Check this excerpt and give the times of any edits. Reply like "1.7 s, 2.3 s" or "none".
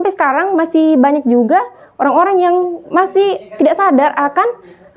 none

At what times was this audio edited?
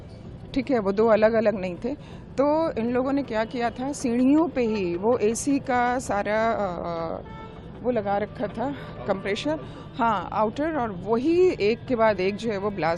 none

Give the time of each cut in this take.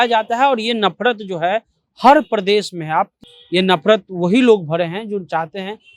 3.2 s

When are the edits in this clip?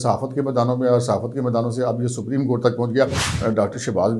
3.3 s

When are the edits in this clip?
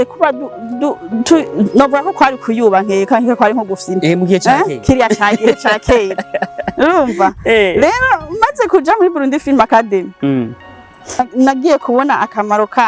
11.2 s

